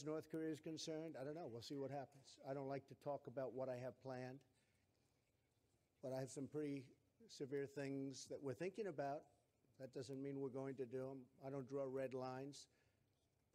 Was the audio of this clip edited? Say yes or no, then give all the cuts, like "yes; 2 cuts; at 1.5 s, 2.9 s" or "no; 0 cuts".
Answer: no; 0 cuts